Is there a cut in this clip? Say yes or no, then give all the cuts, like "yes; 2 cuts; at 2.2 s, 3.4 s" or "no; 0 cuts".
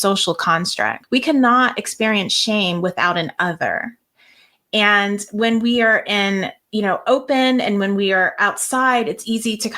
yes; 1 cut; at 1.0 s